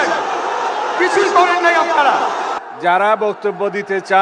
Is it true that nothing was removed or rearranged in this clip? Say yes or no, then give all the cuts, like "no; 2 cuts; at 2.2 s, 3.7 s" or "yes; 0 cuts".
no; 1 cut; at 2.6 s